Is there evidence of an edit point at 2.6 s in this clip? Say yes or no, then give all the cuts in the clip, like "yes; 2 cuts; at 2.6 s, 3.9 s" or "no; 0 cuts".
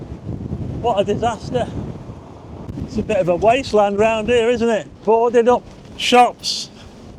yes; 2 cuts; at 2.6 s, 4.9 s